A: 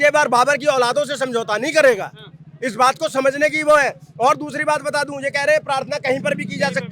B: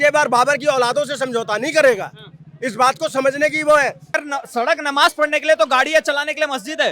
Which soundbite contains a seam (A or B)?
B